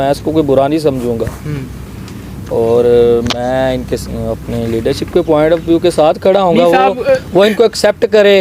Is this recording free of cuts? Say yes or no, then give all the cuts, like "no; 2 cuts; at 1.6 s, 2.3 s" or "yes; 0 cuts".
yes; 0 cuts